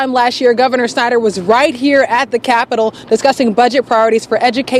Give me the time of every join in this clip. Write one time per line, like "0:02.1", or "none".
none